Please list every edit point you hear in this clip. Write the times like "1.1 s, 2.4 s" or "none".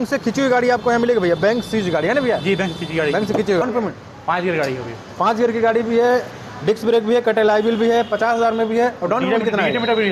3.6 s